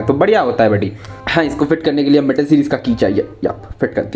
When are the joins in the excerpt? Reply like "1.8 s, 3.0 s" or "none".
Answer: 1.2 s